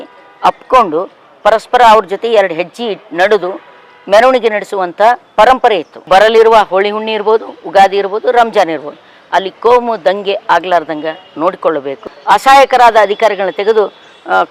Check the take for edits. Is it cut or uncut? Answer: cut